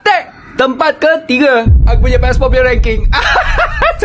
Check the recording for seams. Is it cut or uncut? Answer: uncut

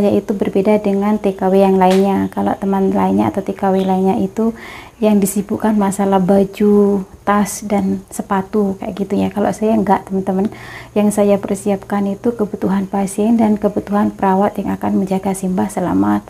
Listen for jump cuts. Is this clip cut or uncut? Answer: uncut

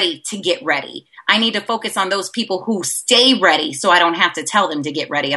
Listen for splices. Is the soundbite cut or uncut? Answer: uncut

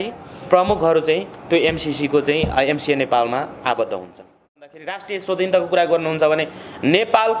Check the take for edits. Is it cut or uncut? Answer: cut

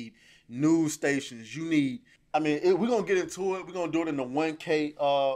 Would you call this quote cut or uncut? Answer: cut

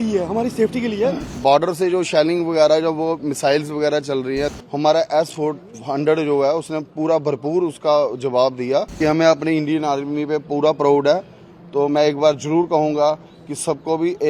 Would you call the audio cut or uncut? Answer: cut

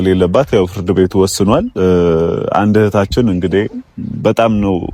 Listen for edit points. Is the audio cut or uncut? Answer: uncut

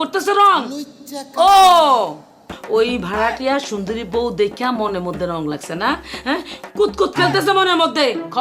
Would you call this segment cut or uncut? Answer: cut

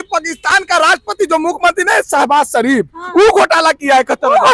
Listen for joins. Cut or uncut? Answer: uncut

